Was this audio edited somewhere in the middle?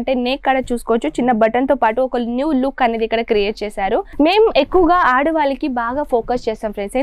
yes; 1 cut; at 4.1 s

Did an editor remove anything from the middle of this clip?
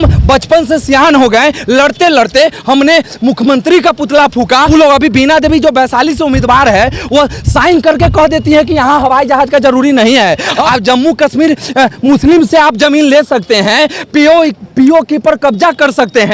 yes; 2 cuts; at 4.7 s, 10.6 s

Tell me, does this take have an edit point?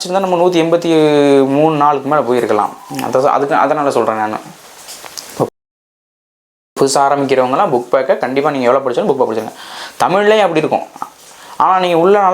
no; 0 cuts

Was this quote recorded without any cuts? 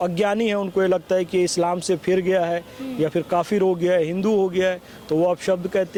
yes; 0 cuts

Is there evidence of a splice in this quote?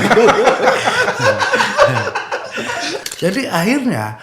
yes; 1 cut; at 3.0 s

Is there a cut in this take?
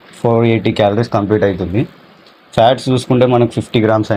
no; 0 cuts

